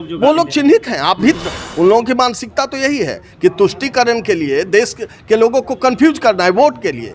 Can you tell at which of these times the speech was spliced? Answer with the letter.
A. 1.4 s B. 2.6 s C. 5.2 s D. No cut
A